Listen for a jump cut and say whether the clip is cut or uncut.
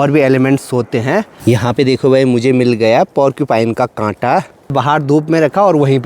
cut